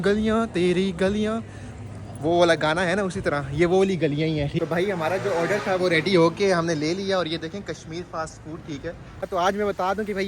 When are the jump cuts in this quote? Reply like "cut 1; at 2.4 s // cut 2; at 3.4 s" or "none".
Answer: cut 1; at 4.6 s // cut 2; at 9.3 s